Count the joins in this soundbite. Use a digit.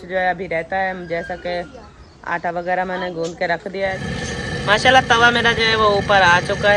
1